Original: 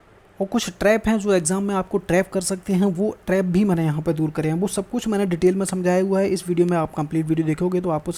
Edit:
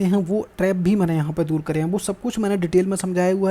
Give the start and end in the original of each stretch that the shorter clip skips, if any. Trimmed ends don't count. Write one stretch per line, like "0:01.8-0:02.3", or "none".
none